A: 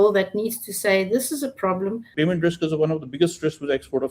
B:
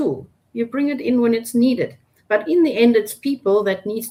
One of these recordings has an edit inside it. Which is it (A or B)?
A